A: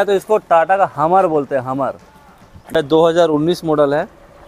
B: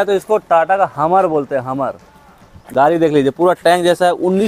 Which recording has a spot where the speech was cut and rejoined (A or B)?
A